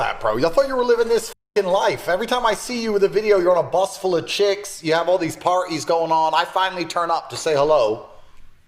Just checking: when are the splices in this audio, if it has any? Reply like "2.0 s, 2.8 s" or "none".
none